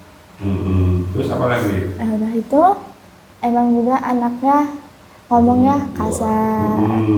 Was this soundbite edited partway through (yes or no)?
no